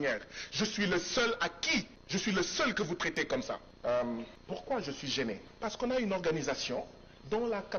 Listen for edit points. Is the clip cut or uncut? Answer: cut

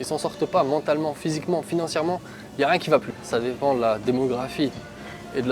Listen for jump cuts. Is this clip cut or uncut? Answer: cut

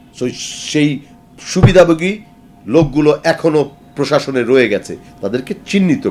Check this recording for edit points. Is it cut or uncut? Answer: uncut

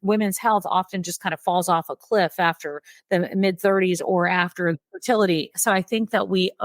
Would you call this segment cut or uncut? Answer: cut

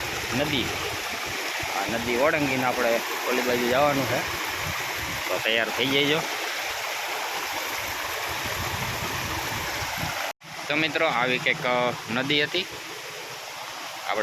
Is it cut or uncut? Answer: uncut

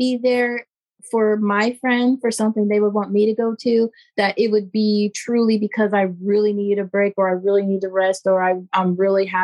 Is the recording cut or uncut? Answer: uncut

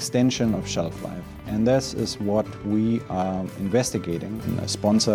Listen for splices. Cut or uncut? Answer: uncut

